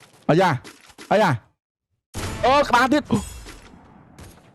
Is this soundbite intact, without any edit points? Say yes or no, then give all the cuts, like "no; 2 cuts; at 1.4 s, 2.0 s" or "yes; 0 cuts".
yes; 0 cuts